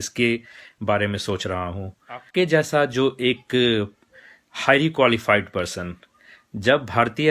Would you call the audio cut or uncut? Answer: cut